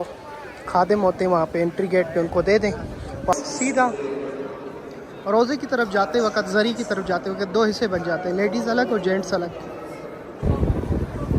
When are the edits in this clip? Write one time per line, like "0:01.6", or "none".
0:03.3
0:10.4